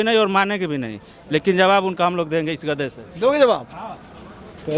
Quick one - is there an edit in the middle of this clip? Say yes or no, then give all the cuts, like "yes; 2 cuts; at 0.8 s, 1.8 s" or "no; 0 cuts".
no; 0 cuts